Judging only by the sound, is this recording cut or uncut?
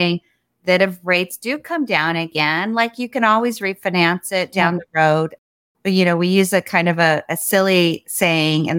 uncut